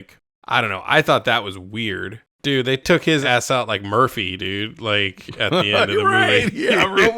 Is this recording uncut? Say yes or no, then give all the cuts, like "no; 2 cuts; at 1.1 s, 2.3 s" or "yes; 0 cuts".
no; 1 cut; at 2.1 s